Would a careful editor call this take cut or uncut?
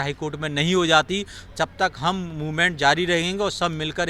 uncut